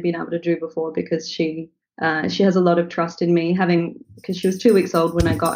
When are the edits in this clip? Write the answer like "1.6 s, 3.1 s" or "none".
none